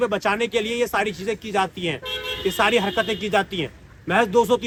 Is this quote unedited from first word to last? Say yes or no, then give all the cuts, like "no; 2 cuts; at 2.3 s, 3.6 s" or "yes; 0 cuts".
yes; 0 cuts